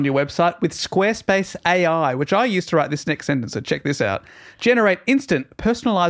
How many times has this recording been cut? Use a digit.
0